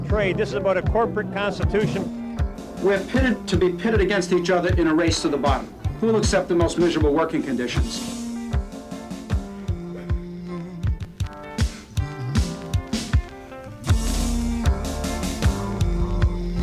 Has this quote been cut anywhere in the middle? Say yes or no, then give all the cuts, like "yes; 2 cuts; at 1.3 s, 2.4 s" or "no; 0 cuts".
no; 0 cuts